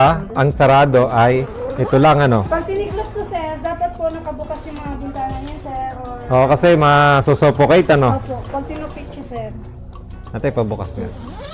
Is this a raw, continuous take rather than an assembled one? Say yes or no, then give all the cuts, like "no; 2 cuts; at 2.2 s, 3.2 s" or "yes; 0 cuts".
yes; 0 cuts